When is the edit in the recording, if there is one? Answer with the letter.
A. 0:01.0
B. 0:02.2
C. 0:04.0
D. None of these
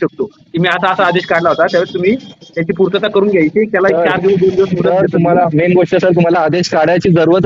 D